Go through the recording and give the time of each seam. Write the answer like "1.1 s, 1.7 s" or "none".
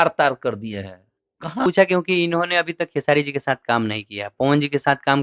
1.7 s